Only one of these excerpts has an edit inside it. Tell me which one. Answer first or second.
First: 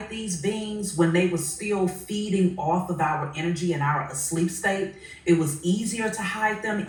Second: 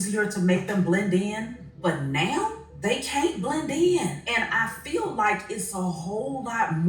second